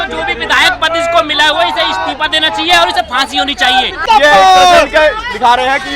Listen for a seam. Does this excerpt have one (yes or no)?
yes